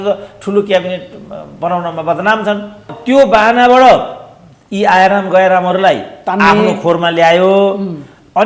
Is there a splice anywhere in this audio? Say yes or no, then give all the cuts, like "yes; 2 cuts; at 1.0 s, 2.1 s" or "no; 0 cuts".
yes; 1 cut; at 2.9 s